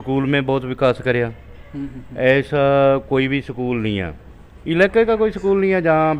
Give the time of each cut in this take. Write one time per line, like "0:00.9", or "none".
none